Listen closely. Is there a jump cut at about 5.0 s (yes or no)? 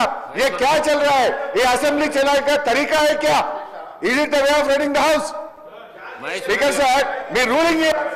no